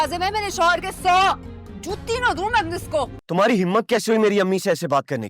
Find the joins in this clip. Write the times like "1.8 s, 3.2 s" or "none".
3.2 s